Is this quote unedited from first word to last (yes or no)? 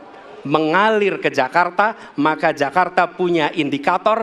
yes